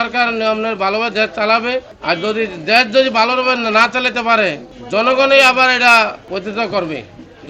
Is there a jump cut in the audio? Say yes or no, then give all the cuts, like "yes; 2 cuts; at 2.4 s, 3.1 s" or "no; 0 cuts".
yes; 3 cuts; at 1.9 s, 4.7 s, 6.2 s